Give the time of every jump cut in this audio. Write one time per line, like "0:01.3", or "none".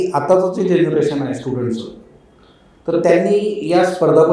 none